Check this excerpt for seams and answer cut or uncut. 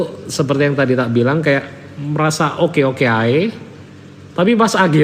uncut